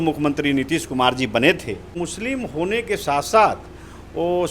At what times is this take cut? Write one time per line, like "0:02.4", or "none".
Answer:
0:01.9